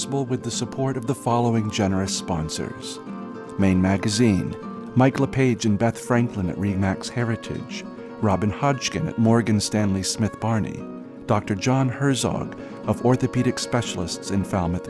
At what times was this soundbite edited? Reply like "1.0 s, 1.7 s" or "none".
none